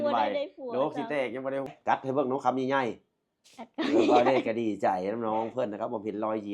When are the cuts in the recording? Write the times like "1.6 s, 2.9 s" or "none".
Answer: 1.7 s